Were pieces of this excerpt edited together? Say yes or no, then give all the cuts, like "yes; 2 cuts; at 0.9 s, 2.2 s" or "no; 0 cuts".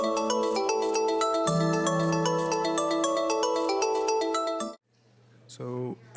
yes; 1 cut; at 2.4 s